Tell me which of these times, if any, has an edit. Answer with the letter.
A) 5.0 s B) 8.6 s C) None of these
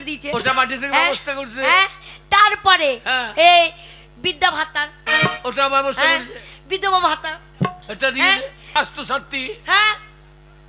B